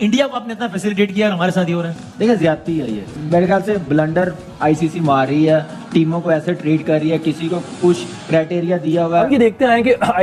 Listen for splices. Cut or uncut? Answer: cut